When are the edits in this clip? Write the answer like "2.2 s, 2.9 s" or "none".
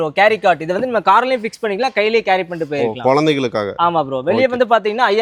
none